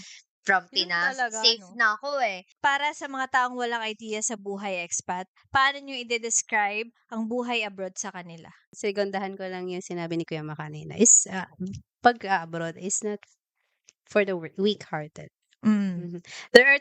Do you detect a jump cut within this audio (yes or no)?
yes